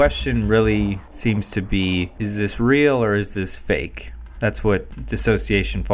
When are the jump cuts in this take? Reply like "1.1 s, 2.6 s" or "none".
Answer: 1.1 s, 2.1 s, 4.9 s